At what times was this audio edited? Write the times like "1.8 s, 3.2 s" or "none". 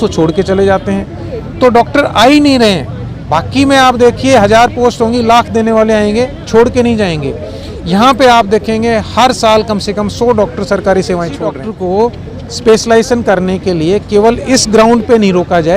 11.7 s